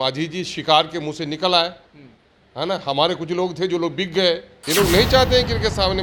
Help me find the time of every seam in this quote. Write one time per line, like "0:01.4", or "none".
0:04.5